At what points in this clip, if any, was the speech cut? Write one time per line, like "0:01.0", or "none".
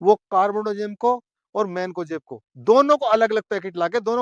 none